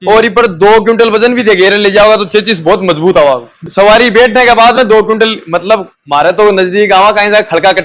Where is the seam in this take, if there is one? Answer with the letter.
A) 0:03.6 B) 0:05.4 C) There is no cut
A